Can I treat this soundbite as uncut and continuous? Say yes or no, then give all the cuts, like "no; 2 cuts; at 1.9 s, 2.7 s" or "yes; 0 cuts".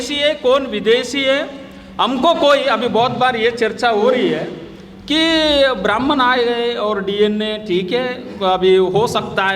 yes; 0 cuts